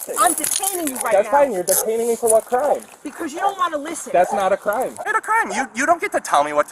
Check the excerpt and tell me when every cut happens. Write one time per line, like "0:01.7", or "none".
0:05.0